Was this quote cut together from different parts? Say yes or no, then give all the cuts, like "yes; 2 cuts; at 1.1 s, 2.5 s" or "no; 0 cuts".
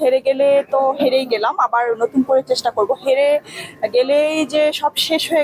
no; 0 cuts